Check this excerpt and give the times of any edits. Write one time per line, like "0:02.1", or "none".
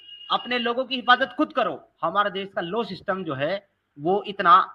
0:02.3